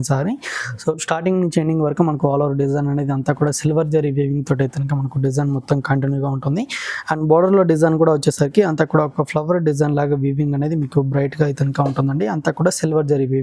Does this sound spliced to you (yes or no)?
no